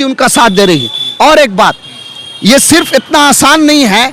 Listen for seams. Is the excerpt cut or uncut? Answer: uncut